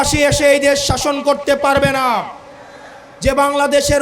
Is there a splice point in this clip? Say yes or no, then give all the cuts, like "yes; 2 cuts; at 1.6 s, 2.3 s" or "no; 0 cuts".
no; 0 cuts